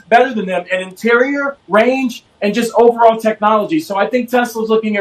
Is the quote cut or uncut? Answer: uncut